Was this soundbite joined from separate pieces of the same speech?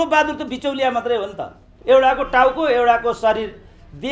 yes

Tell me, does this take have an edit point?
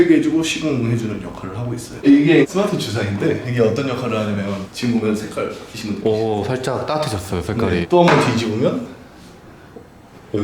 yes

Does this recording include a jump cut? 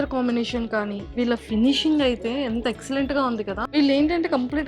yes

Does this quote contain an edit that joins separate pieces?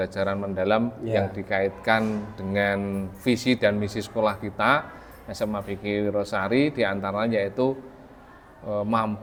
no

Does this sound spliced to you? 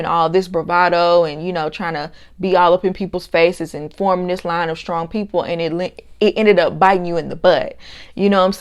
no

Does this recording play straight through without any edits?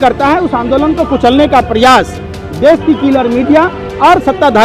yes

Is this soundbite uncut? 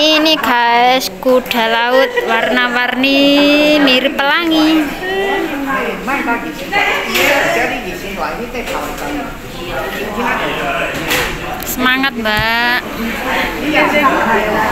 yes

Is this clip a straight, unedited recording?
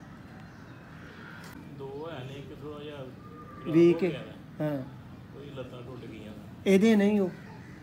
no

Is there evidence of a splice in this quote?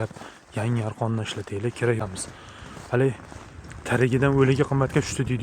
yes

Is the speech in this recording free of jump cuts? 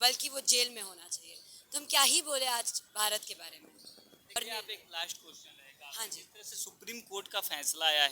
no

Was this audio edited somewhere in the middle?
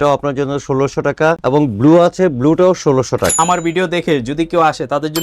yes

